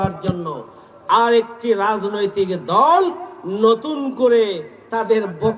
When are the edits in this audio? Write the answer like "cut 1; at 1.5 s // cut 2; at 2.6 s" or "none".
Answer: none